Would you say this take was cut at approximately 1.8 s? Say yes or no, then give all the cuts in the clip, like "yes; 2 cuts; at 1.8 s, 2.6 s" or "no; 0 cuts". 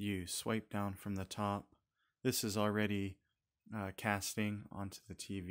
no; 0 cuts